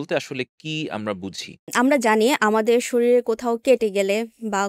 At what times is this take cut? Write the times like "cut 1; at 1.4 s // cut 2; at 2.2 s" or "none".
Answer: cut 1; at 1.7 s